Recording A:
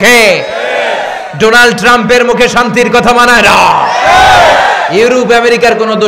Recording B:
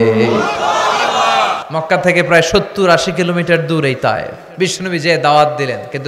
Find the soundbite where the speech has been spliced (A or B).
B